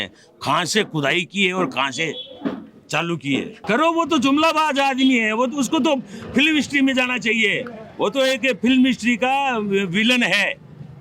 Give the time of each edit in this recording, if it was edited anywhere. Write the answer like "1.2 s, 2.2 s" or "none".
3.6 s

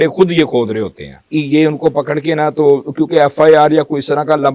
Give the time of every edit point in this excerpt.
1.2 s

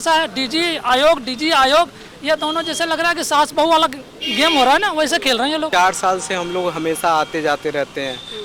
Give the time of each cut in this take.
5.7 s

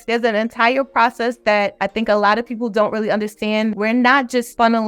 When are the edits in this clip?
3.7 s

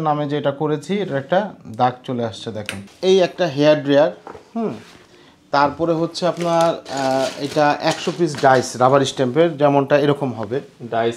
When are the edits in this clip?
2.8 s

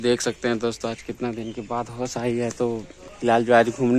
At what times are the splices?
none

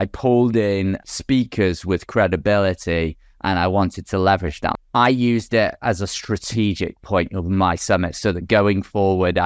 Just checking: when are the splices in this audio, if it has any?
1.0 s, 4.8 s

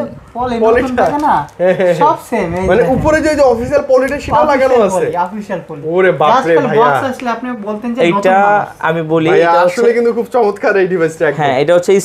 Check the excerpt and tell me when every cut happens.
none

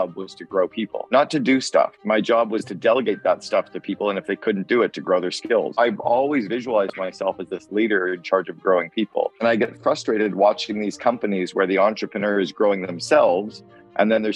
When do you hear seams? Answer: 1.0 s, 2.0 s, 5.8 s

